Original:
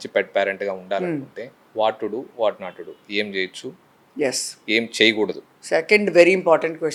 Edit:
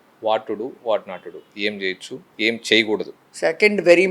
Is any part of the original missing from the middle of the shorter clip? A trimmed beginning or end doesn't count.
yes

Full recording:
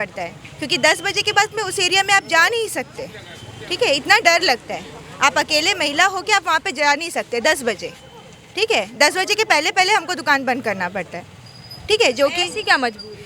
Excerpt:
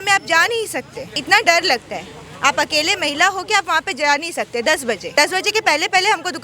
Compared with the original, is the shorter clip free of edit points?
no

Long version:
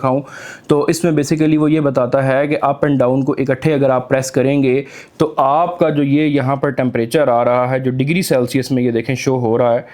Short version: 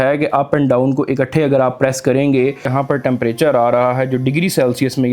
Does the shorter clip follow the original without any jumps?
no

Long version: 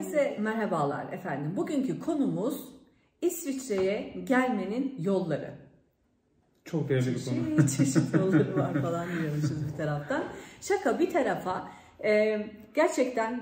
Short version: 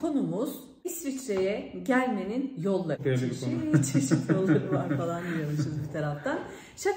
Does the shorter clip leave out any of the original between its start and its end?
yes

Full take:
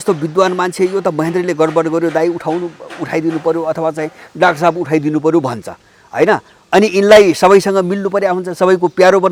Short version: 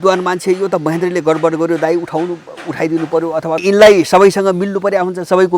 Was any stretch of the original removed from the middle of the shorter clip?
yes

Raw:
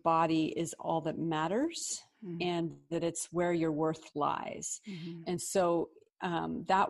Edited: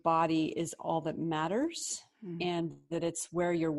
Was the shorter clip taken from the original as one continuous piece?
yes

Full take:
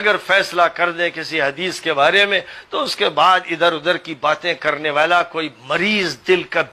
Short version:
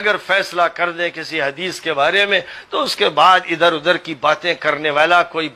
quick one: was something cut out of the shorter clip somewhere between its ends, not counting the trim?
no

